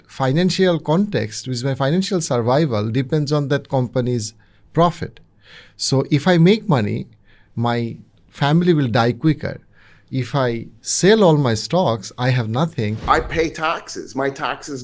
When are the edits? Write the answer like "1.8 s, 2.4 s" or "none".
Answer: 13.0 s

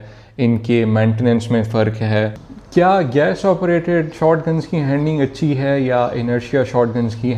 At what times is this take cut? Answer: 2.4 s

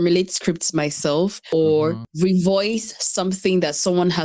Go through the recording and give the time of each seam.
1.4 s, 2.0 s

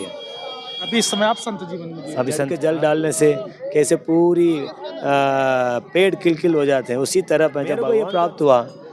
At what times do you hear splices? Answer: 2.5 s, 7.8 s

